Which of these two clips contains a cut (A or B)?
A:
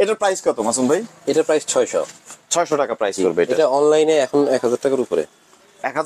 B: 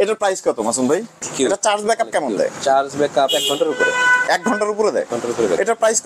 B